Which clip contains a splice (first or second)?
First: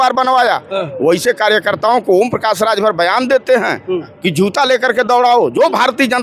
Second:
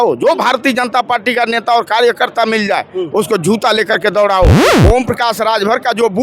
second